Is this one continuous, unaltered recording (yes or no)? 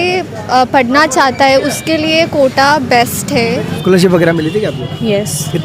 no